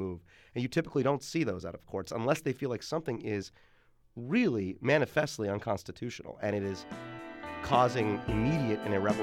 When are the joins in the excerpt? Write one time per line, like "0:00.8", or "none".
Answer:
0:01.8